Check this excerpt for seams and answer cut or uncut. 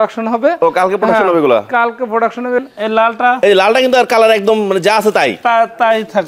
cut